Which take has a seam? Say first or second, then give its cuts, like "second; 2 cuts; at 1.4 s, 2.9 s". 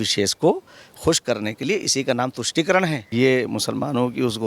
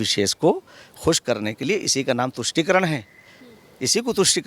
first; 1 cut; at 3.0 s